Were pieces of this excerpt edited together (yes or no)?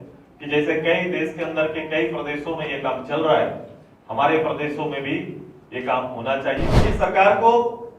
yes